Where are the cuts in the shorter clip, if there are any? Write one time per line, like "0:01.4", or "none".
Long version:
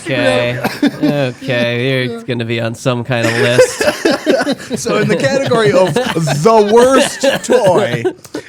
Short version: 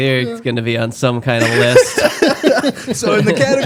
none